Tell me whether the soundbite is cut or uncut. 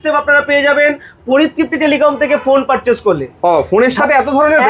uncut